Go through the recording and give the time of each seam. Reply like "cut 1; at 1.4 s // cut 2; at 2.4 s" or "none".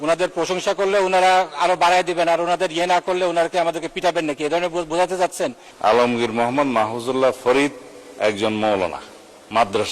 cut 1; at 5.6 s